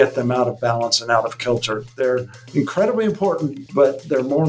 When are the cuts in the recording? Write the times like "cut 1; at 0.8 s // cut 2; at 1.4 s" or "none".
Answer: cut 1; at 3.6 s